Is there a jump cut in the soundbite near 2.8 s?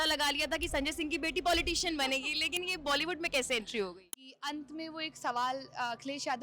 no; 1 cut; at 4.1 s

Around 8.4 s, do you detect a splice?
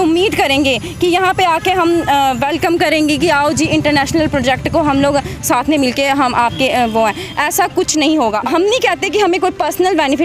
yes; 1 cut; at 8.4 s

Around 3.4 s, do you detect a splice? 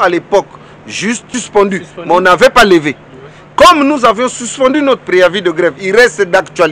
no; 1 cut; at 1.4 s

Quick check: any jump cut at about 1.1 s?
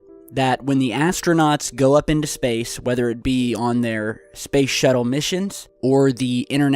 yes; 1 cut; at 1.1 s

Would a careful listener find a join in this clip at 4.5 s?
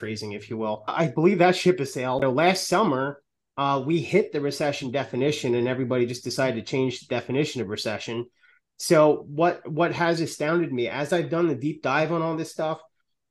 no; 2 cuts; at 1.0 s, 2.2 s

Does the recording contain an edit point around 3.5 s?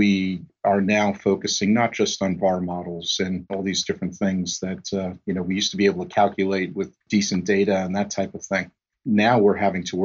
yes; 2 cuts; at 3.5 s, 7.0 s

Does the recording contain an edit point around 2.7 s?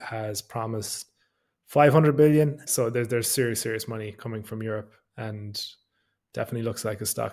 yes; 1 cut; at 2.7 s

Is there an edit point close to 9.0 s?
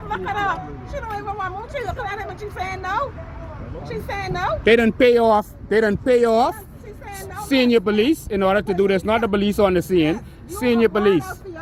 no; 0 cuts

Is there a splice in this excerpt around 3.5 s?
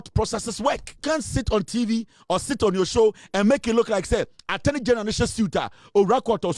no; 1 cut; at 1.0 s

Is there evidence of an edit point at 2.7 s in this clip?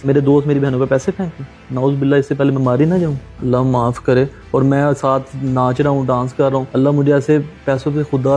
no; 1 cut; at 6.7 s

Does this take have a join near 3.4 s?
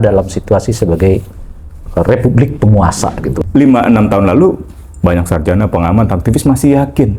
yes; 1 cut; at 3.4 s

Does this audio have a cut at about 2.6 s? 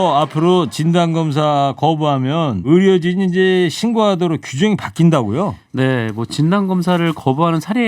yes; 1 cut; at 2.6 s

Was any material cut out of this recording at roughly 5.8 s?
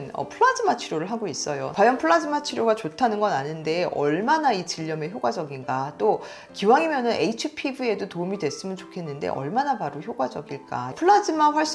no; 2 cuts; at 1.7 s, 10.9 s

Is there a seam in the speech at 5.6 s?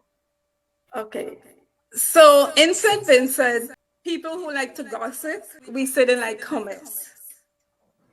yes; 2 cuts; at 3.8 s, 5.6 s

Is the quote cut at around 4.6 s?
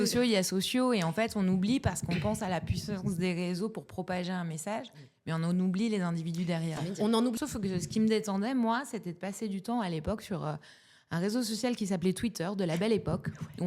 no; 1 cut; at 7.3 s

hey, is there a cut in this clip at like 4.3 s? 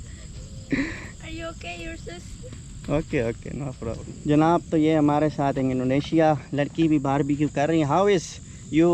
yes; 1 cut; at 4.3 s

